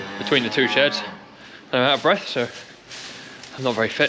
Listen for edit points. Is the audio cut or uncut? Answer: uncut